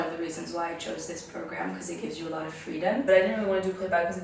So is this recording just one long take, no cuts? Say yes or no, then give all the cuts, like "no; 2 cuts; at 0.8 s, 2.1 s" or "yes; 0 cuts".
no; 1 cut; at 3.0 s